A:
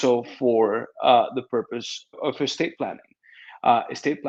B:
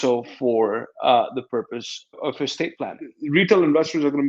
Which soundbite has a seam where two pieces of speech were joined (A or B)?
B